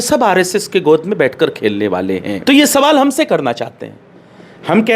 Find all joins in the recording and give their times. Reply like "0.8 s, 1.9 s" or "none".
2.4 s